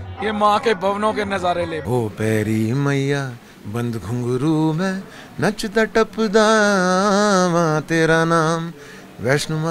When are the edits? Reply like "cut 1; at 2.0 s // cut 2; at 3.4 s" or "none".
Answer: cut 1; at 1.8 s